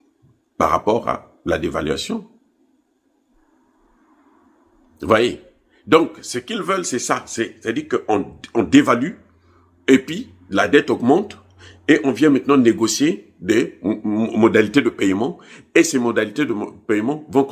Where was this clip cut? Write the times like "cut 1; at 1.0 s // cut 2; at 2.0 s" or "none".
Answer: cut 1; at 3.4 s